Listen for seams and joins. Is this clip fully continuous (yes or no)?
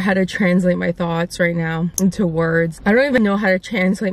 no